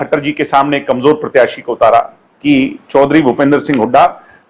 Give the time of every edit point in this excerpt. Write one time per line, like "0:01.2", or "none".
0:02.2